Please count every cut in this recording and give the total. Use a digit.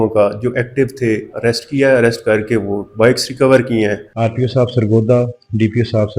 2